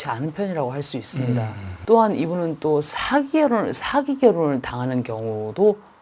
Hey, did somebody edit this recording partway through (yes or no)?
yes